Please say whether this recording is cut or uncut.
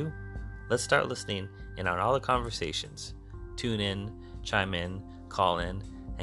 uncut